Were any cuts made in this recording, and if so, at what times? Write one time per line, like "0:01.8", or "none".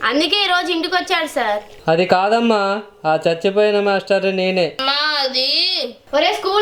0:04.8